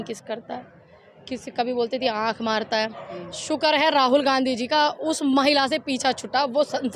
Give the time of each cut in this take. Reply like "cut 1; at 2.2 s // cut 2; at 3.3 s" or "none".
none